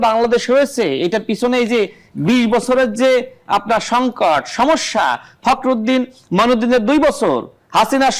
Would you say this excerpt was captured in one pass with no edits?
yes; 0 cuts

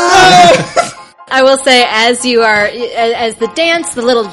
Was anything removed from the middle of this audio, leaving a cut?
yes; 1 cut; at 1.2 s

